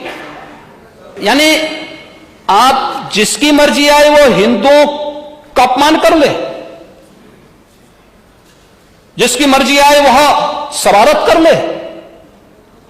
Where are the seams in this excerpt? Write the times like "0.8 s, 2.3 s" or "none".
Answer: 1.1 s